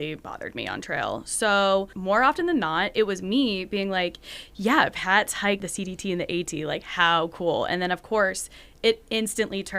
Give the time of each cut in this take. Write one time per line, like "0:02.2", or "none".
0:01.9
0:05.6